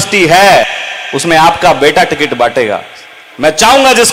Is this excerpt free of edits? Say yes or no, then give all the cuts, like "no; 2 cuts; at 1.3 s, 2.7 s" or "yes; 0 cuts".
yes; 0 cuts